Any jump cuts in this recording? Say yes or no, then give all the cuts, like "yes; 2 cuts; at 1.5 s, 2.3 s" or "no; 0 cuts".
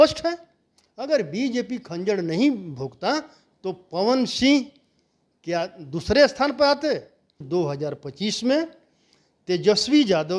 yes; 1 cut; at 7.4 s